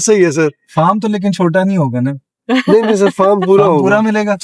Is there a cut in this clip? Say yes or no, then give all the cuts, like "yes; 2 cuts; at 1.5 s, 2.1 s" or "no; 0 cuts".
no; 0 cuts